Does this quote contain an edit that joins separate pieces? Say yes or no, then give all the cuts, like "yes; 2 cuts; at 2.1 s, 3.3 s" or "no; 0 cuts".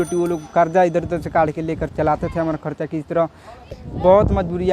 yes; 1 cut; at 3.7 s